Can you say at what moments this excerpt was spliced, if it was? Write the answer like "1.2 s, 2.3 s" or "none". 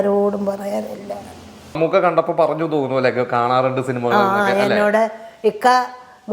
1.8 s